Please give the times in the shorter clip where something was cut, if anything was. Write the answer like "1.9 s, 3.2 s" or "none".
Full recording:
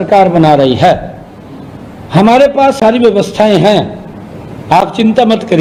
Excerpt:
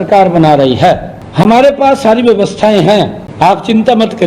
1.2 s, 3.2 s